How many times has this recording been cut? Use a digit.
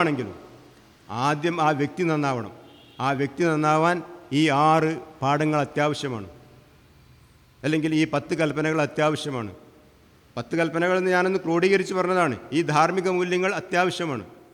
0